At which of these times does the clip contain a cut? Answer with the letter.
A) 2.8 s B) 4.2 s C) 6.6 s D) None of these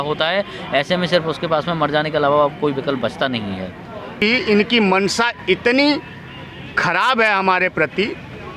B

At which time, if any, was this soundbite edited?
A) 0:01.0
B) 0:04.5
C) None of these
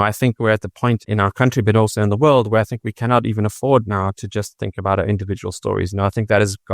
A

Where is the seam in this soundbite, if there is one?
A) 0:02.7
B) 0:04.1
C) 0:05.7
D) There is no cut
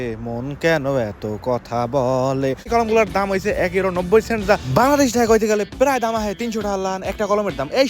A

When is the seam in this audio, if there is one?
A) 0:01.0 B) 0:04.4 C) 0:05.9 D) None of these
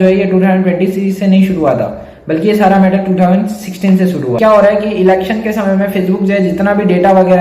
B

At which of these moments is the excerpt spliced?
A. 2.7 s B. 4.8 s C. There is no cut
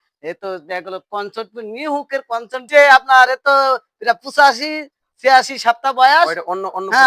A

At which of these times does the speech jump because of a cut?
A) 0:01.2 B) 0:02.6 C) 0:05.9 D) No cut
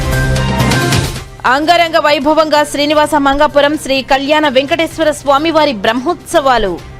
A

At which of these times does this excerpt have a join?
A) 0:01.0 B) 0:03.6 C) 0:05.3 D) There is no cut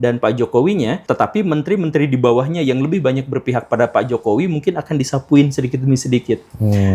A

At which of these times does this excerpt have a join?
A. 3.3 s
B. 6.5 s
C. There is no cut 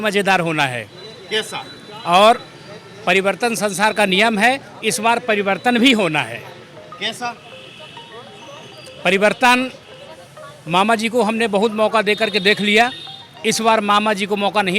C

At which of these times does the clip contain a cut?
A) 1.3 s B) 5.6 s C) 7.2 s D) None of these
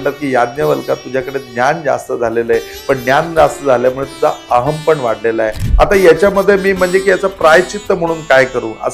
B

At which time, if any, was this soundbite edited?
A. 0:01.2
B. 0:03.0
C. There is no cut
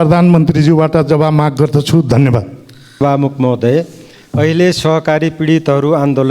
B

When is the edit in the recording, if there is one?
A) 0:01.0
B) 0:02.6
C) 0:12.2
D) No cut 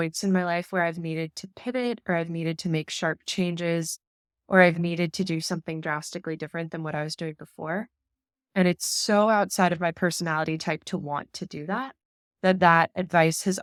D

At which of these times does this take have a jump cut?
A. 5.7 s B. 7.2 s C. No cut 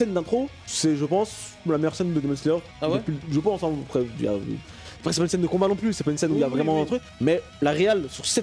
C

